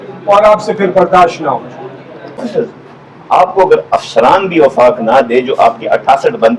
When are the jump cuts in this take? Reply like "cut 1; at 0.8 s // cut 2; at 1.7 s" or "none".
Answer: cut 1; at 2.4 s